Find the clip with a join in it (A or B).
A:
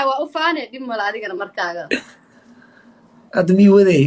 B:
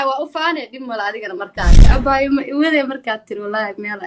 B